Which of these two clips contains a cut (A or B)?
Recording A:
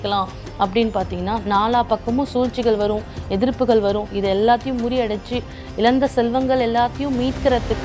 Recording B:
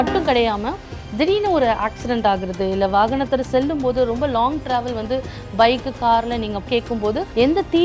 B